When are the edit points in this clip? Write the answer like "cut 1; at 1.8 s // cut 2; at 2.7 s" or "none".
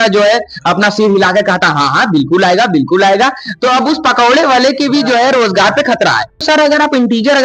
cut 1; at 6.4 s